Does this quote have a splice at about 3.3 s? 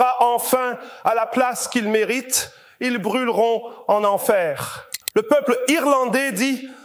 no; 1 cut; at 4.9 s

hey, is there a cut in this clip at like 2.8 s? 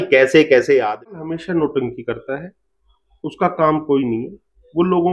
no; 1 cut; at 1.1 s

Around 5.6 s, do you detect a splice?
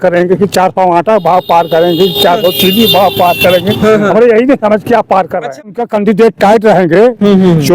yes; 1 cut; at 5.6 s

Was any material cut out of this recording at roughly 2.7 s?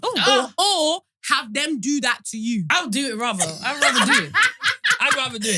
yes; 1 cut; at 2.7 s

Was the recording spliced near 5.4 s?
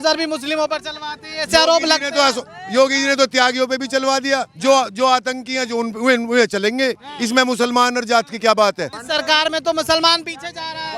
no; 1 cut; at 9.0 s

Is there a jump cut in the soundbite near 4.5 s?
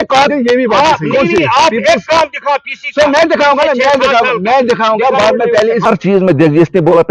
no; 1 cut; at 5.8 s

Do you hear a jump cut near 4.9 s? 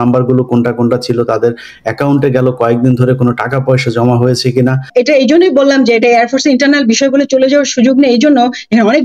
yes; 1 cut; at 4.9 s

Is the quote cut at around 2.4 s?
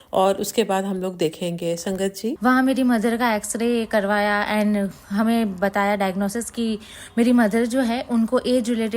yes; 1 cut; at 2.4 s

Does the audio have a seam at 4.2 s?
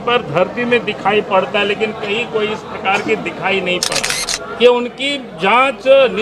yes; 1 cut; at 4.2 s

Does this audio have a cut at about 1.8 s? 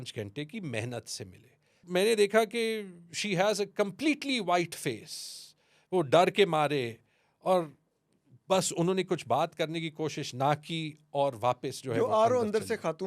yes; 1 cut; at 1.8 s

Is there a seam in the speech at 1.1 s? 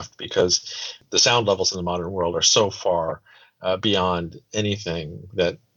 yes; 1 cut; at 1.1 s

